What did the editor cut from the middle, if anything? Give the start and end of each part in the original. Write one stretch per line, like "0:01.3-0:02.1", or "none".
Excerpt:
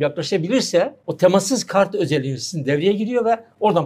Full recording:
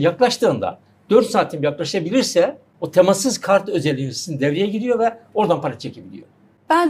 0:02.6-0:02.8